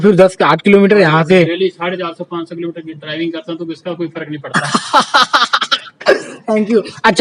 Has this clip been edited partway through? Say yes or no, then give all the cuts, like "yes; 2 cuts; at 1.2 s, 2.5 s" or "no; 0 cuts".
no; 0 cuts